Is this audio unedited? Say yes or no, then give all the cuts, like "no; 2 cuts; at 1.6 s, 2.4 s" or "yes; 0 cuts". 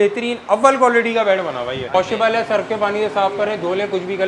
no; 1 cut; at 1.9 s